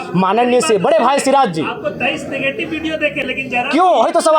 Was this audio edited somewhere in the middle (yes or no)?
no